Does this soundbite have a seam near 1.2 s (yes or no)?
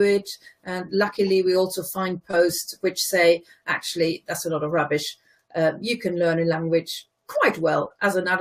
yes